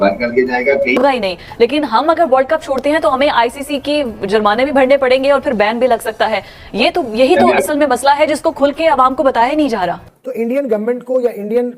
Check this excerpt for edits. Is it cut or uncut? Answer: cut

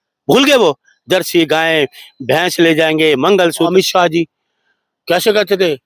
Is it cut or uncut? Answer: cut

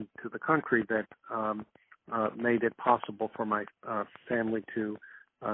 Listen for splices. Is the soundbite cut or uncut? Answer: uncut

